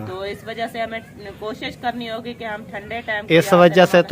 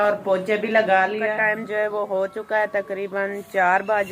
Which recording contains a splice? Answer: second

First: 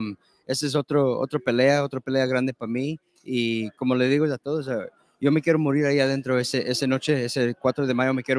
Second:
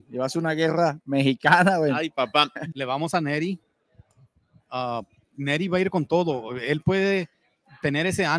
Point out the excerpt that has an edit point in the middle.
second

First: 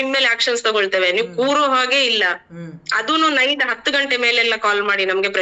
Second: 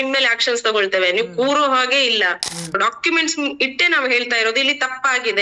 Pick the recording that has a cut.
second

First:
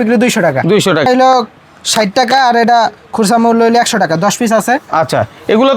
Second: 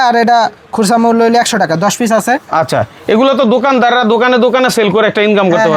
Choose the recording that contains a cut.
first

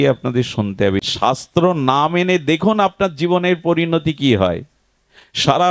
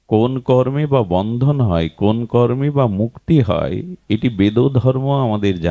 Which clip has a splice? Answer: first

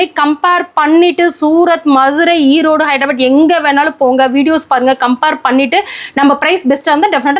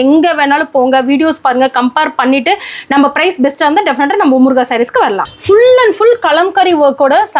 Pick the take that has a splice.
second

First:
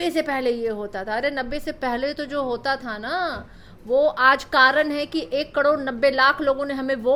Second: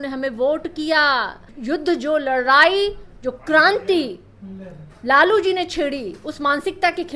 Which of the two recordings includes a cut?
second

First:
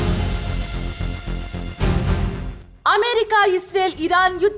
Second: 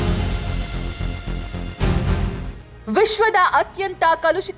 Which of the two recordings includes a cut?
second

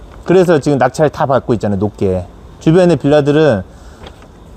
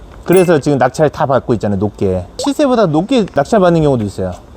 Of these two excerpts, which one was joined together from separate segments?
second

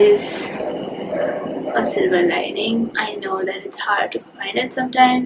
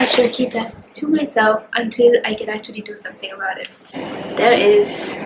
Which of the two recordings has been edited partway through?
second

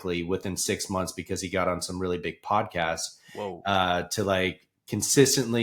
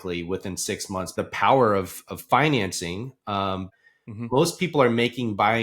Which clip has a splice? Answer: second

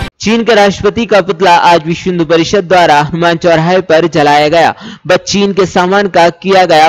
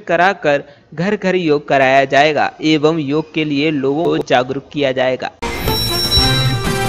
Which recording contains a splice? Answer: second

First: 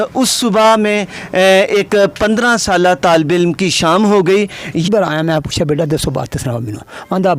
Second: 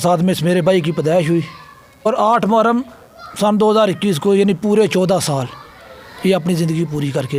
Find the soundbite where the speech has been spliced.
first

